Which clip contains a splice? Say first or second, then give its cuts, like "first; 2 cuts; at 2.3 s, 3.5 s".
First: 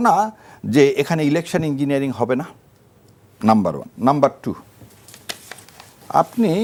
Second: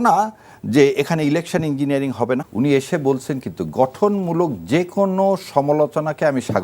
second; 1 cut; at 2.5 s